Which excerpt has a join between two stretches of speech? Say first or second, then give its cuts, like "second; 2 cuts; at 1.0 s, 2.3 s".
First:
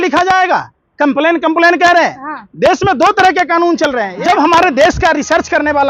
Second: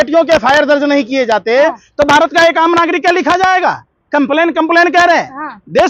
first; 1 cut; at 4.1 s